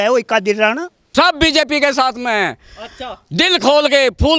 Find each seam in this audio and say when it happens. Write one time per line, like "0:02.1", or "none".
0:01.0